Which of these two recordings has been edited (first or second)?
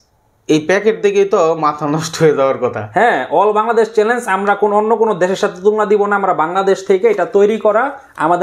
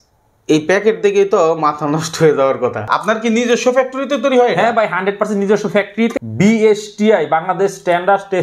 second